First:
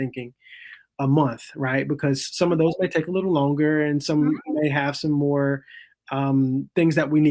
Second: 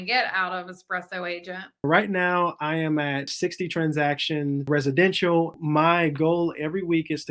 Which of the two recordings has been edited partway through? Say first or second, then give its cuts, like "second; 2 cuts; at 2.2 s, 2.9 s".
second; 4 cuts; at 1.8 s, 3.3 s, 4.7 s, 5.6 s